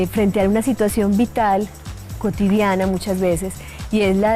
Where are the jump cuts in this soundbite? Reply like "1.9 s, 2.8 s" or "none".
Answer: 3.0 s

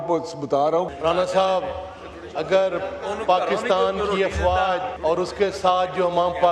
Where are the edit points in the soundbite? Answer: 0.9 s, 4.9 s

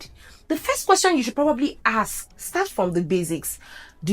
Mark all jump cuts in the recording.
2.4 s

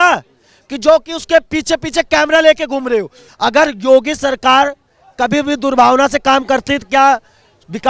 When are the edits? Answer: 3.2 s

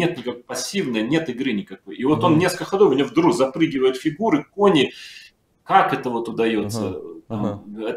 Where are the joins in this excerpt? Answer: none

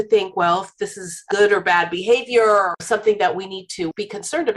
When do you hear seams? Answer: 1.2 s, 2.8 s

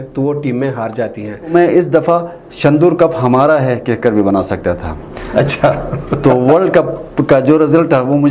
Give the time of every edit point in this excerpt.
1.5 s

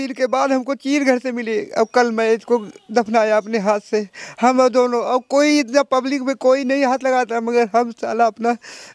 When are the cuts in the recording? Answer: none

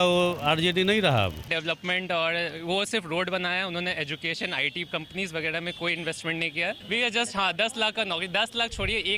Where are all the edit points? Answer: 1.5 s, 6.8 s

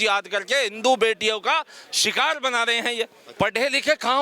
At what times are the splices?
3.2 s

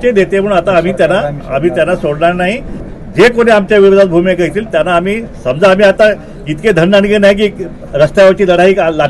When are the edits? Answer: 2.8 s

